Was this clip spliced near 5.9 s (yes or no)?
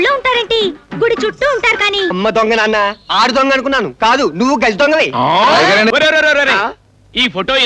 yes